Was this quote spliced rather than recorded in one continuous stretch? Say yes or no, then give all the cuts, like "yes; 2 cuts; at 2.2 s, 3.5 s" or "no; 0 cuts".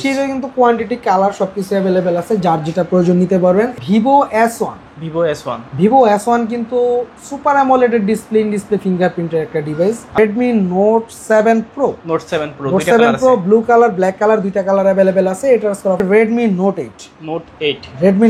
yes; 3 cuts; at 3.7 s, 10.2 s, 16.0 s